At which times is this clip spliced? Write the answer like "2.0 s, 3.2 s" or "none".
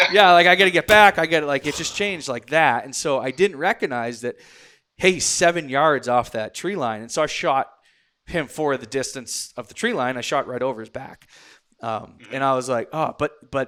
none